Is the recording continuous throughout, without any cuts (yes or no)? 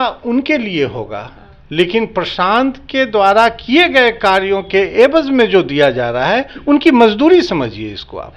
yes